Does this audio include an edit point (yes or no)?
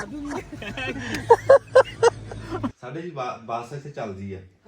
yes